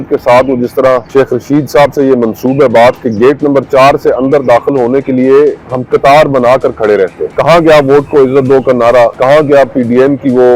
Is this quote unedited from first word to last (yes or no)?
no